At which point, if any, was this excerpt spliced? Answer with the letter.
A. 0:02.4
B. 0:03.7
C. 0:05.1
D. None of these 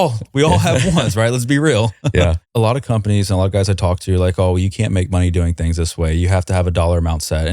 A